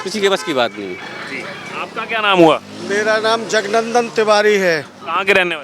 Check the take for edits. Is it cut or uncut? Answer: uncut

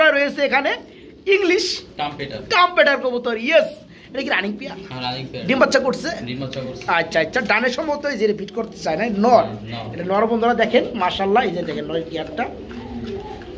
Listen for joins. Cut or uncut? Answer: uncut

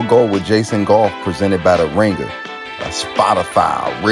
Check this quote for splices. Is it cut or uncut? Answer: uncut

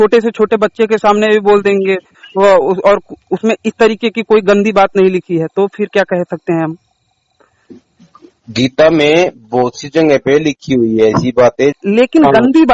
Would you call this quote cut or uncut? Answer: cut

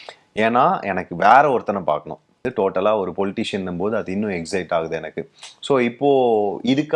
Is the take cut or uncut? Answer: cut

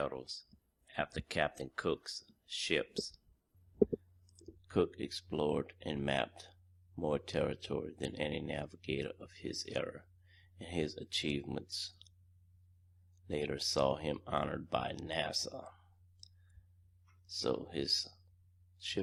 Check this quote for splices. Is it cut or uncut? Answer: uncut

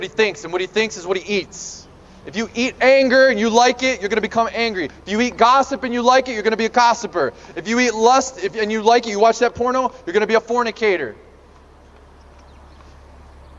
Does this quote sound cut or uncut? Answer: uncut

